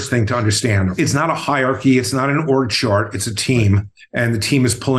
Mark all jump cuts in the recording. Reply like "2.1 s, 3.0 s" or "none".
0.9 s